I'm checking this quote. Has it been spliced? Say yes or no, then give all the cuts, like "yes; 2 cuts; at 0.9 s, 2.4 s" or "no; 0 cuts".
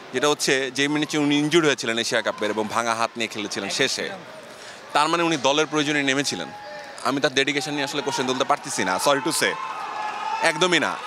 no; 0 cuts